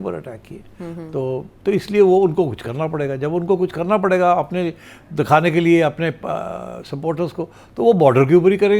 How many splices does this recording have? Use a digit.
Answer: 0